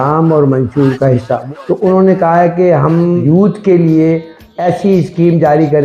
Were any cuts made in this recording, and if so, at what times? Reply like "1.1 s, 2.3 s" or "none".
1.4 s, 3.2 s, 4.6 s